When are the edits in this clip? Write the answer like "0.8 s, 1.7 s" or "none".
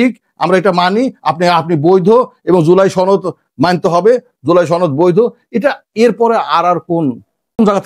none